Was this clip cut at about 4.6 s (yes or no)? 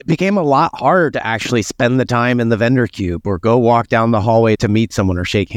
yes